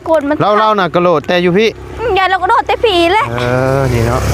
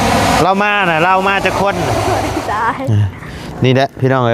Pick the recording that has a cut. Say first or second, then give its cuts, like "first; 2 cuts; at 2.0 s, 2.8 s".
second; 1 cut; at 2.1 s